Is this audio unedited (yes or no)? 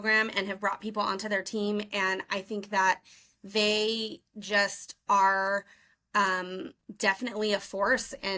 yes